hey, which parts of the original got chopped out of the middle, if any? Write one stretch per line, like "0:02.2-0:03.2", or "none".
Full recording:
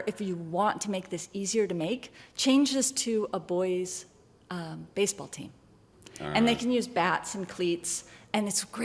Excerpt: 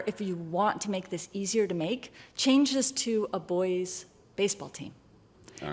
0:04.2-0:04.8